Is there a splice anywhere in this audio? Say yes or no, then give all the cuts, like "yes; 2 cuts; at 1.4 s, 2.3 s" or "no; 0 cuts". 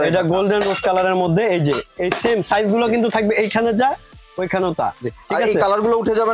no; 0 cuts